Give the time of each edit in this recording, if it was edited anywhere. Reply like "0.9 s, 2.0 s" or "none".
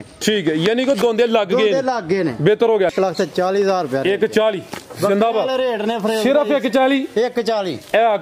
2.9 s